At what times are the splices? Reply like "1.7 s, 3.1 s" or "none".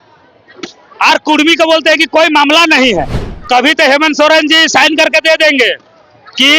3.2 s